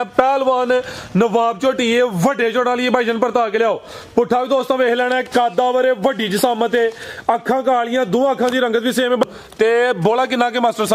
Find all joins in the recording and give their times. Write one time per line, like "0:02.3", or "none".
0:09.3

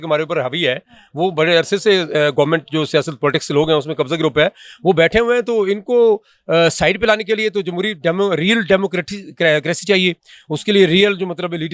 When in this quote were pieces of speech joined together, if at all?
none

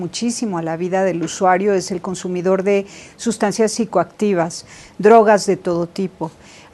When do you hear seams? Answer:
none

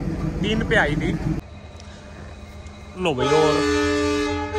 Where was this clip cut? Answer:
0:01.4

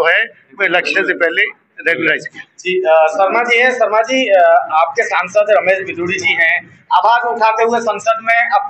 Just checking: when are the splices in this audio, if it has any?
none

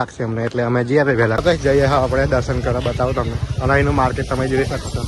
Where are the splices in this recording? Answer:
0:01.4

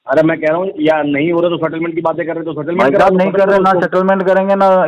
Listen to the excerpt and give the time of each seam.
none

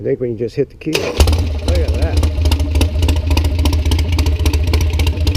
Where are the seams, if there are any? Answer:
none

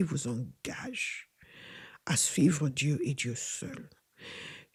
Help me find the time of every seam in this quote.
none

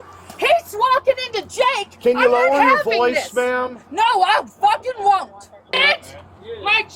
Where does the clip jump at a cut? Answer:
0:05.8

